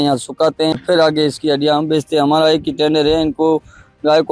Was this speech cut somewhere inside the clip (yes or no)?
no